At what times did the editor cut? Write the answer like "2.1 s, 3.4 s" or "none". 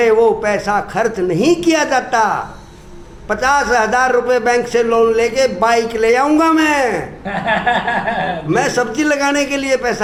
none

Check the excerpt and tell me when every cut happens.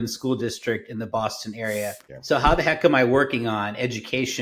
none

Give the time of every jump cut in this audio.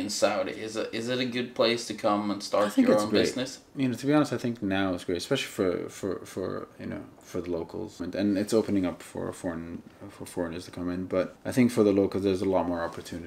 8.0 s, 11.4 s

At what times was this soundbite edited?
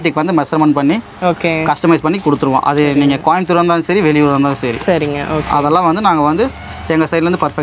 none

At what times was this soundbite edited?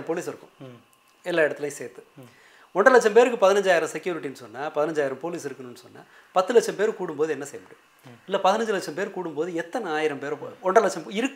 none

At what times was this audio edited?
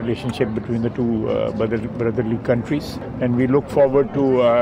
3.0 s

